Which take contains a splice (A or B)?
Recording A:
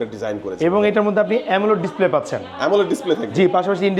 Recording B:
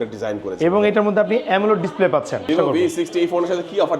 B